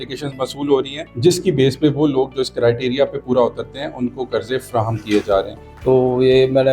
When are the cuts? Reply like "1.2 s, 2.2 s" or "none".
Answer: 1.0 s, 5.6 s